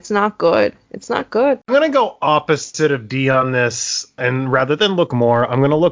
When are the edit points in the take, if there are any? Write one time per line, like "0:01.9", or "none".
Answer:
0:04.2